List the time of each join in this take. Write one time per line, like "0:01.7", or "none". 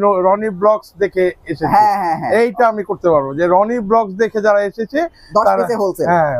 none